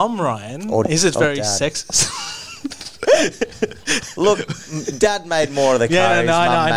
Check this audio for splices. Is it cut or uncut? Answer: uncut